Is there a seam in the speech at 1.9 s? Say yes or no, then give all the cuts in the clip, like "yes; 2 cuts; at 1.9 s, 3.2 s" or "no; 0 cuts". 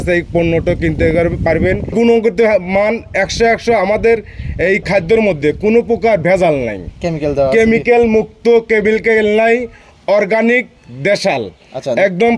yes; 1 cut; at 1.9 s